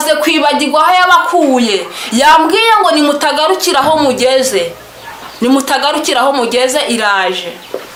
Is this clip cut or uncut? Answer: uncut